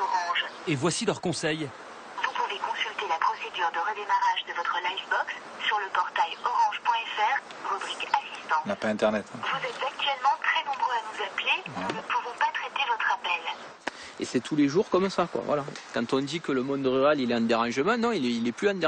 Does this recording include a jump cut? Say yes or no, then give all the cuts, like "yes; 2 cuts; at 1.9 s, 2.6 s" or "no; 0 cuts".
yes; 1 cut; at 13.7 s